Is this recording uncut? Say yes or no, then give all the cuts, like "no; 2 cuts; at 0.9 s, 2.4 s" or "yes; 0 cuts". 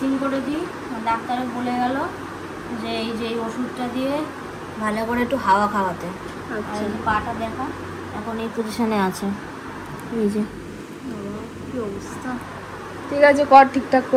yes; 0 cuts